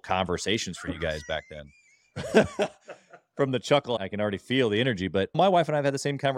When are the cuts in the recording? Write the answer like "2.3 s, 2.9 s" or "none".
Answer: 4.0 s, 5.4 s